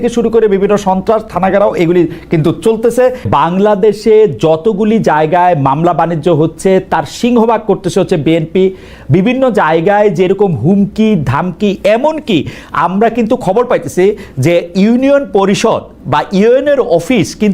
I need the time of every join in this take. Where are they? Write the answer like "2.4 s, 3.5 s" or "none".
3.2 s